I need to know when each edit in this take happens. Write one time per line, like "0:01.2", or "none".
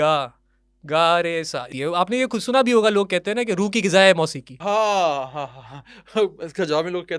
0:01.7
0:04.5